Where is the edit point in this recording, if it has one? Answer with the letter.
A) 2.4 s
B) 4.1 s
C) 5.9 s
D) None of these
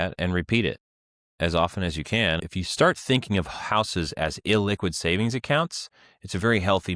A